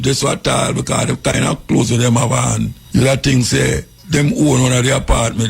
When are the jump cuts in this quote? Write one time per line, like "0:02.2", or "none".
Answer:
0:02.8
0:03.9